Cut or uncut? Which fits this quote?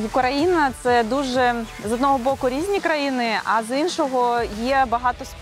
uncut